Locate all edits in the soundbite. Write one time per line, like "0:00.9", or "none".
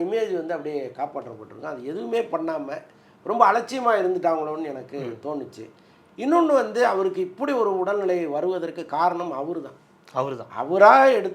none